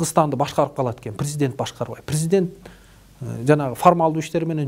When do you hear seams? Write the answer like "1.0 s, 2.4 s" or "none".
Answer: none